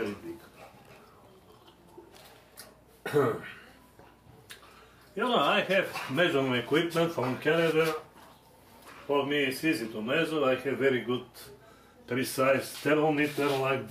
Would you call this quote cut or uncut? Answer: cut